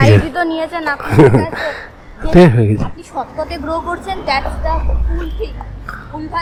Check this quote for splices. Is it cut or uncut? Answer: uncut